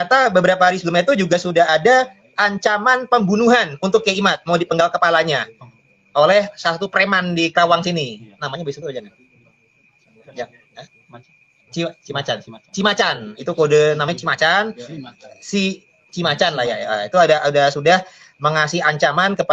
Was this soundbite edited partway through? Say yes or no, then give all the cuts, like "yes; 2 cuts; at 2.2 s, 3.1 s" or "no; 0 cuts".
no; 0 cuts